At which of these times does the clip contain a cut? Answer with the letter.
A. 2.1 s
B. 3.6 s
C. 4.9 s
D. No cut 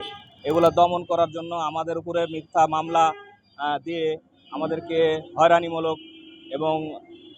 D